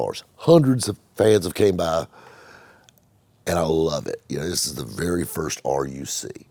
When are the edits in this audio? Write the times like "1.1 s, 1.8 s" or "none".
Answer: none